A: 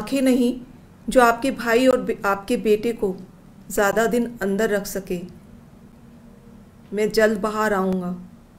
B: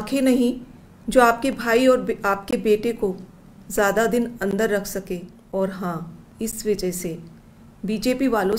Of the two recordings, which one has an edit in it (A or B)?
B